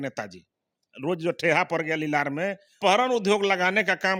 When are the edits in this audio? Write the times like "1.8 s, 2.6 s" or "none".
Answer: 2.7 s